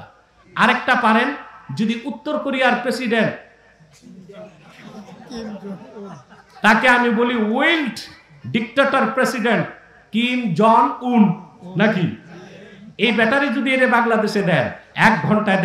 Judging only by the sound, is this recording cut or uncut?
uncut